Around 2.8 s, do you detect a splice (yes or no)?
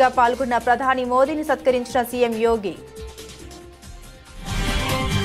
yes